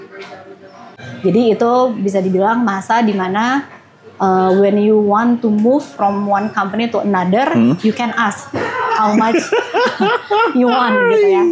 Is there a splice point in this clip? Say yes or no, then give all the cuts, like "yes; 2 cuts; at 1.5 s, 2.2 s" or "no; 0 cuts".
yes; 1 cut; at 1.3 s